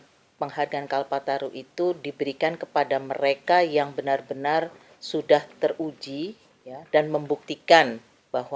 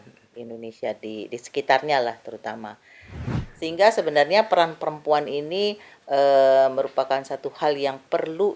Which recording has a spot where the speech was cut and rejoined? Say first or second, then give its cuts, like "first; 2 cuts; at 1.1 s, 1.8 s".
second; 1 cut; at 3.2 s